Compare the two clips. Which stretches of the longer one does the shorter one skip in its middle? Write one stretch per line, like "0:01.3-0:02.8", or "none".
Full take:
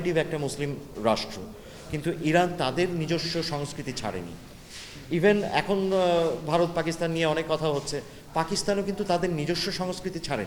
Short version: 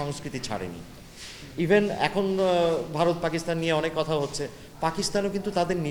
none